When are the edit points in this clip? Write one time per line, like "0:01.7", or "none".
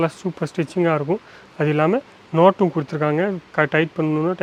none